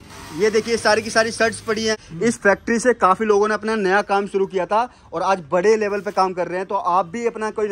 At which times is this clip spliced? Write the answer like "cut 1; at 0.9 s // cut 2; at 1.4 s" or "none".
cut 1; at 2.1 s

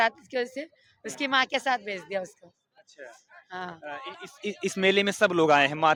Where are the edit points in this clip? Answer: none

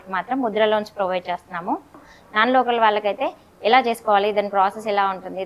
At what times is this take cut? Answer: cut 1; at 2.1 s

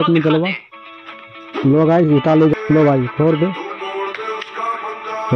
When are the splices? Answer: cut 1; at 2.5 s

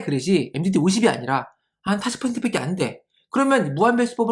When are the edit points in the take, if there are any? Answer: none

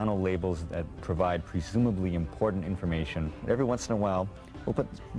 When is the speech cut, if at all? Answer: cut 1; at 1.0 s // cut 2; at 3.3 s

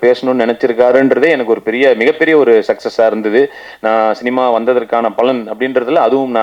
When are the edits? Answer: none

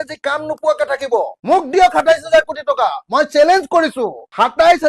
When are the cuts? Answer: none

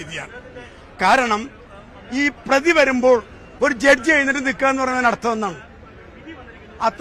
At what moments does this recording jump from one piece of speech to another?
none

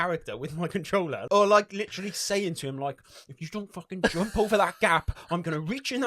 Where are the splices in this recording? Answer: cut 1; at 1.2 s

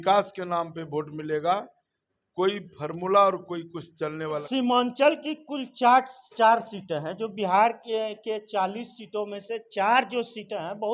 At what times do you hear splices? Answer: cut 1; at 4.4 s

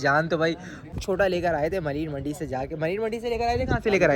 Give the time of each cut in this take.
cut 1; at 0.9 s

